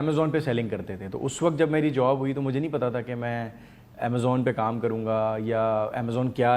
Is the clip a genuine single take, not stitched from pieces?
yes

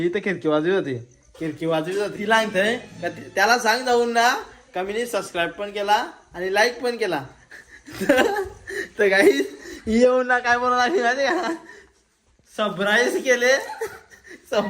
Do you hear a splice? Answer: yes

